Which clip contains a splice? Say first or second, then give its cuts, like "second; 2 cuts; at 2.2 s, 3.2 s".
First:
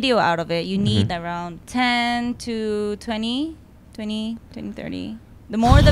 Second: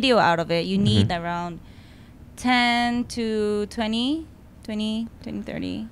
first; 1 cut; at 1.6 s